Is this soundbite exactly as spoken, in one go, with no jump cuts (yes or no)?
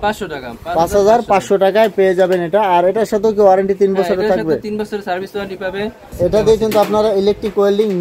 no